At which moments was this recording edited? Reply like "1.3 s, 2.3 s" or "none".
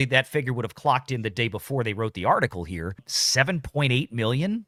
none